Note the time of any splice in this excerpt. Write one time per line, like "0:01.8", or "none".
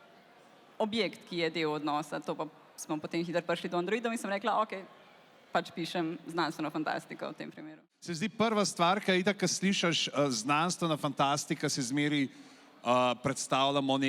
0:07.7